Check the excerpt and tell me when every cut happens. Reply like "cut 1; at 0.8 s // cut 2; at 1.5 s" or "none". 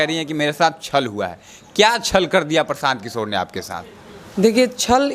none